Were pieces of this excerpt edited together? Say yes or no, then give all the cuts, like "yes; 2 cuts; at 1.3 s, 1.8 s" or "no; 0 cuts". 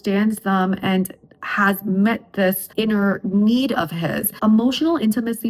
no; 0 cuts